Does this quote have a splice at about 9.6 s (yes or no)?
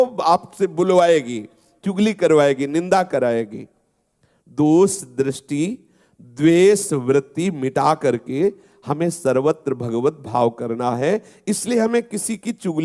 no